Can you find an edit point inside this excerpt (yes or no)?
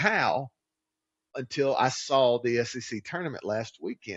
yes